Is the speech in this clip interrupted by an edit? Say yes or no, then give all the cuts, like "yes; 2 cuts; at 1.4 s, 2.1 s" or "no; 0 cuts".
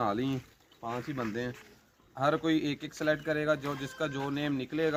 no; 0 cuts